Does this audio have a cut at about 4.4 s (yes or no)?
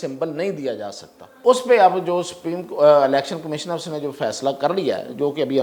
no